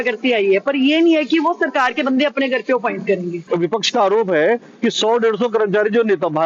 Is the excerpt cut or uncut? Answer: cut